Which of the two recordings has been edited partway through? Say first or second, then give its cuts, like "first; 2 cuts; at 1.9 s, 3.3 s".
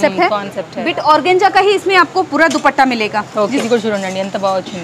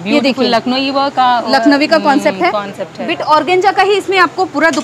first; 1 cut; at 3.6 s